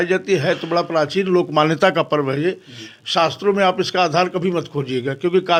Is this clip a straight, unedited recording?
yes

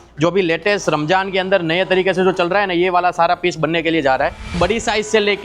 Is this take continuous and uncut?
no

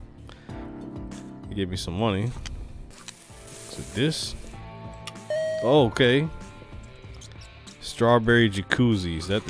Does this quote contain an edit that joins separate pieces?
yes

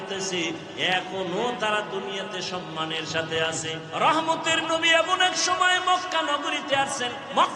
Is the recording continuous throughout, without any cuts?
no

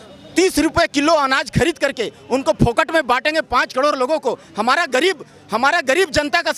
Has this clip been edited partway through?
no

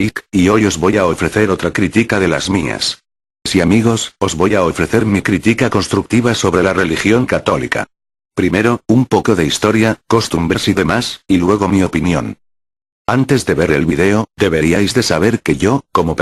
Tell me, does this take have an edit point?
yes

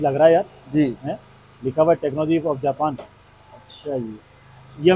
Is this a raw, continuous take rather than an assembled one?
yes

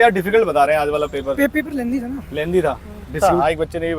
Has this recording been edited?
yes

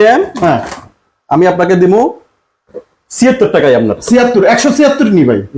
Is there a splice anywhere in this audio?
no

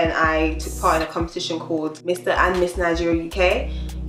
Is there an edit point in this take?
no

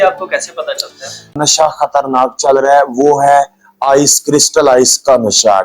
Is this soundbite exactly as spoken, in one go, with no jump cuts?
no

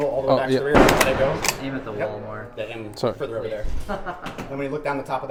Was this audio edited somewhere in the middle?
no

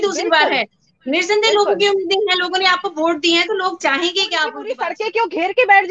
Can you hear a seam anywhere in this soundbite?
yes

